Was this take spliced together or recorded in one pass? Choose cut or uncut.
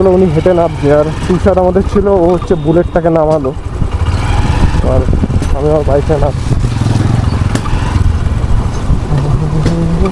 uncut